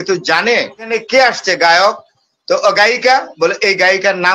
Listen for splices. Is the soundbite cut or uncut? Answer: cut